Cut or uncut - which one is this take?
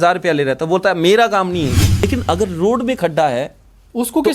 cut